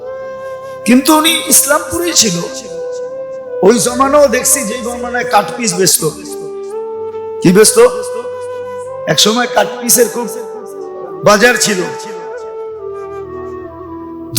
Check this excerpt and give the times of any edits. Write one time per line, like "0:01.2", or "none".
0:02.5
0:03.6